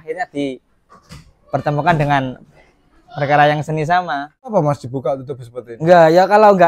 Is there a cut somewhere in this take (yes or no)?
yes